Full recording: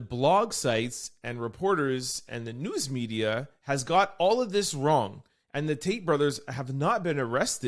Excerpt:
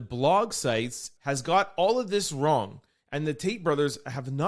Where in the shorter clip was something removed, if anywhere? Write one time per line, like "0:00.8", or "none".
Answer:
0:01.1

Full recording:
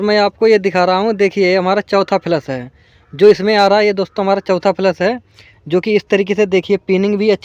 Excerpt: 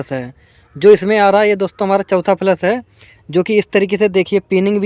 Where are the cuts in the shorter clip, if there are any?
none

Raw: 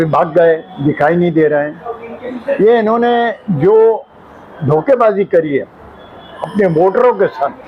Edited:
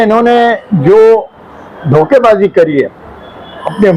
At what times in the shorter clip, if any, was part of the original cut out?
none

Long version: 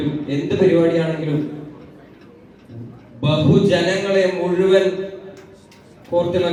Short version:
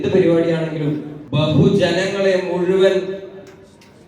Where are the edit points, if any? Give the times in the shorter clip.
0:01.2

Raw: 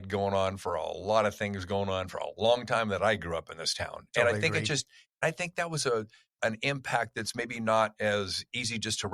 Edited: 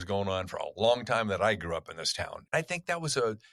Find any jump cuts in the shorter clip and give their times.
0:02.3

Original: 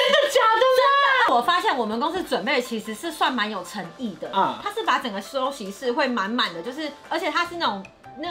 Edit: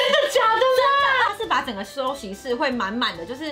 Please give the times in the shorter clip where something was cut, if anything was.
0:01.3

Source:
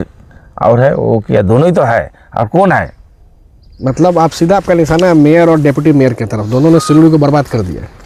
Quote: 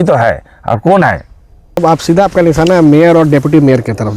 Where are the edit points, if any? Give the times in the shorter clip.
0:01.8

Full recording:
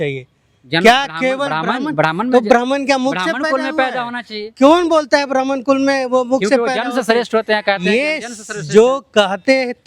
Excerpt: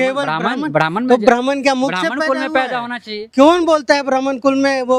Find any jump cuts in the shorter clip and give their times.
none

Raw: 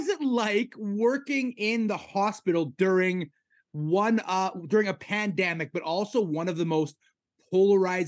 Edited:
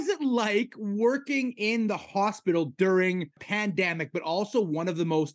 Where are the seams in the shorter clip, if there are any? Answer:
0:03.4

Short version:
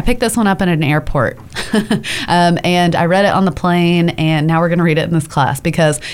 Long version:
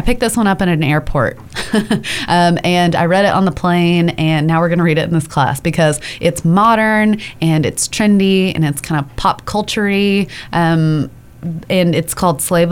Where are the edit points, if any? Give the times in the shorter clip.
none

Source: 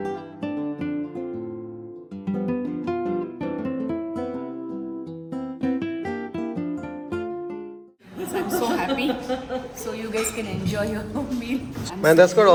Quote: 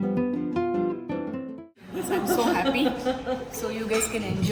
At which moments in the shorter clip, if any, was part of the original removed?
0:01.5

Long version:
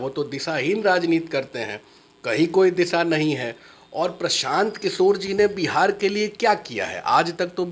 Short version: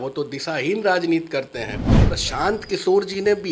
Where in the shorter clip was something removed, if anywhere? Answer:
0:02.1

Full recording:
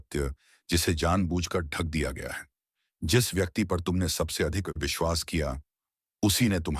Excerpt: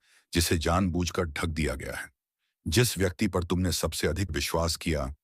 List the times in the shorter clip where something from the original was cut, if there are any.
0:04.3

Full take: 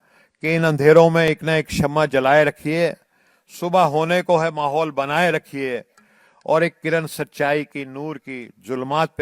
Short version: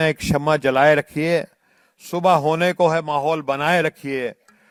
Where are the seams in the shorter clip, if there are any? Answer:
none

